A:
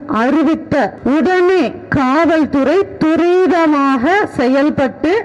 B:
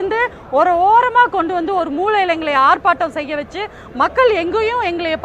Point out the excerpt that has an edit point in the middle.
A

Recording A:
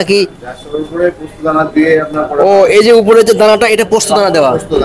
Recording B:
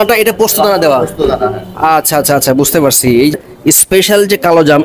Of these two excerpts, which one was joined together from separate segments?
B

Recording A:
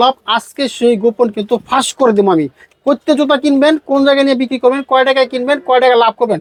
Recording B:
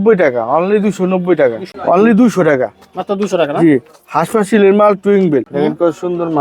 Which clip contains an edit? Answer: B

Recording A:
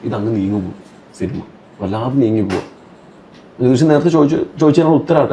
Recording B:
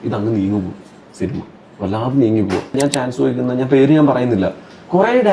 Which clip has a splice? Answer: B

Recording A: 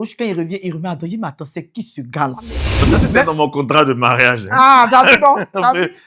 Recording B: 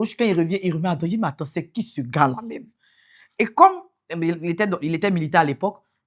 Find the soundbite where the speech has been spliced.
A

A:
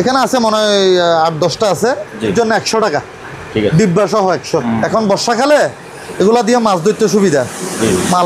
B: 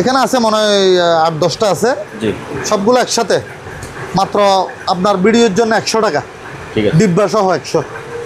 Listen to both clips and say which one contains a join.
A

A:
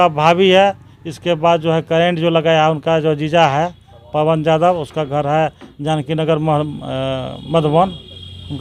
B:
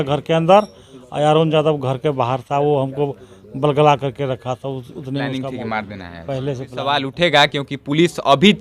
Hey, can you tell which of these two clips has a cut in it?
B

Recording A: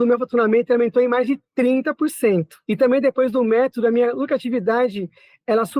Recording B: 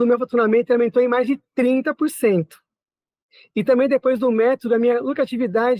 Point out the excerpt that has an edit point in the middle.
A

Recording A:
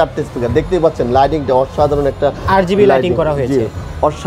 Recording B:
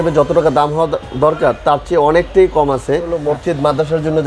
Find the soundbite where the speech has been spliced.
B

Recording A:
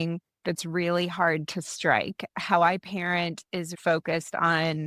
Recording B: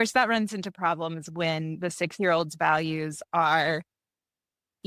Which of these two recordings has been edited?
A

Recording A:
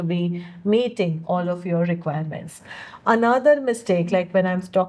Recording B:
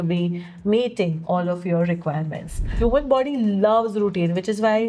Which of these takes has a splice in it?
B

